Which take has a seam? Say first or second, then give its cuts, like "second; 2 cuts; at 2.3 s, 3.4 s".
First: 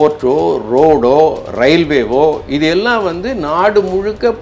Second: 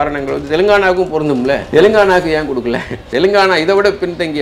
second; 2 cuts; at 1.6 s, 3.1 s